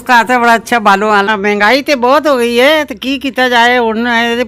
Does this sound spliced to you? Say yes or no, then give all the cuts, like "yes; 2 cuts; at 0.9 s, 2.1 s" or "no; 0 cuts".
yes; 1 cut; at 1.2 s